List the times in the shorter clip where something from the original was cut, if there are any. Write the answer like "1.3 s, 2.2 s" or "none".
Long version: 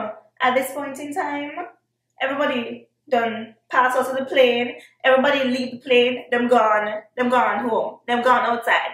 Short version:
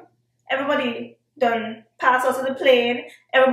none

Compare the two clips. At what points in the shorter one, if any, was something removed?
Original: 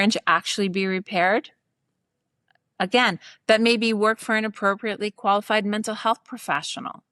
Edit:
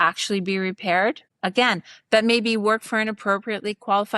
1.3 s

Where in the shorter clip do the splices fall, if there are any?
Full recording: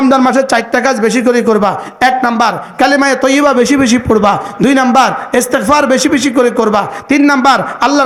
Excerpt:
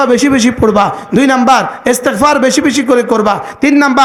none

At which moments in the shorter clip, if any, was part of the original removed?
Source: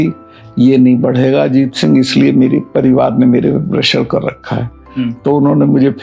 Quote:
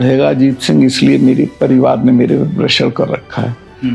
none

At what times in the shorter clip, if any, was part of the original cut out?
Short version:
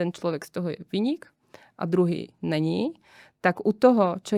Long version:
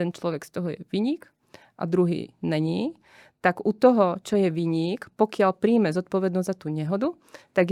none

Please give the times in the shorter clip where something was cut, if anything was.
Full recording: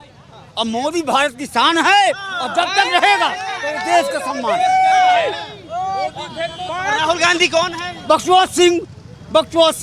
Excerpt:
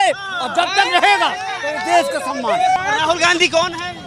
2.8 s

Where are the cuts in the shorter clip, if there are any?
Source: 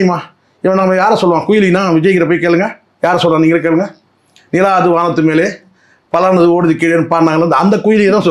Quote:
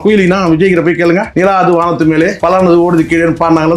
1.3 s, 2.4 s

